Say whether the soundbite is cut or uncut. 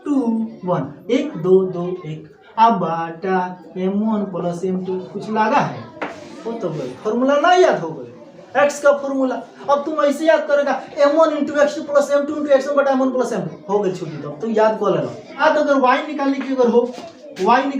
cut